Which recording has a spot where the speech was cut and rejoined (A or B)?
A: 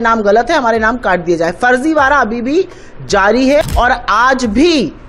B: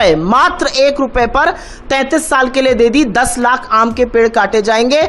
A